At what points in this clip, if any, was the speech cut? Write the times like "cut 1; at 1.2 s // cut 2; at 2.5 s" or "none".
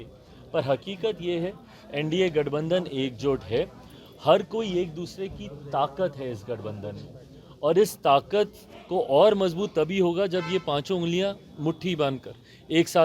none